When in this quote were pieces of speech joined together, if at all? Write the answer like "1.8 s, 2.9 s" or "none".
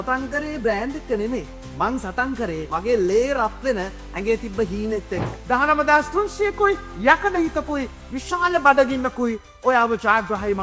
2.7 s, 5.3 s